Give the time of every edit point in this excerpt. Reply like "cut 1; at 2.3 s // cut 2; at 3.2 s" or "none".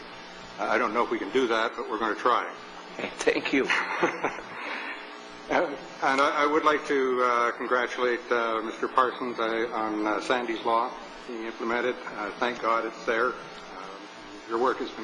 cut 1; at 9.7 s